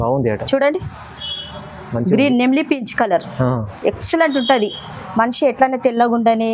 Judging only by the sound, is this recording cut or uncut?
uncut